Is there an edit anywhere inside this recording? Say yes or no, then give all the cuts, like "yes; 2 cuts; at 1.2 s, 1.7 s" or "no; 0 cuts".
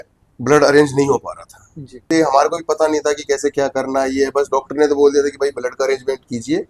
yes; 1 cut; at 2.1 s